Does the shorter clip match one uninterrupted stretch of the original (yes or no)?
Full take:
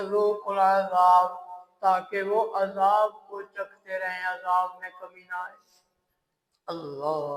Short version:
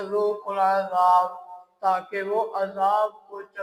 yes